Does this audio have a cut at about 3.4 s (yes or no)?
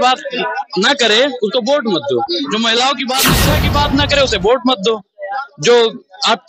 yes